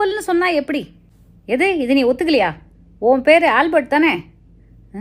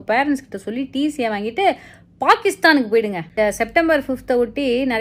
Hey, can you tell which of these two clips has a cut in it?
second; 1 cut; at 3.2 s

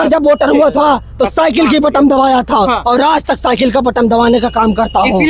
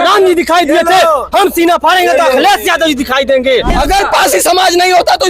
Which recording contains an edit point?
second; 1 cut; at 3.7 s

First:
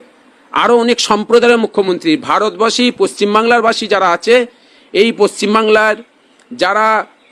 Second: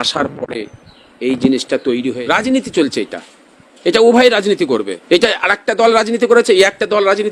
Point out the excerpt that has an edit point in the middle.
second; 2 cuts; at 2.1 s, 4.9 s

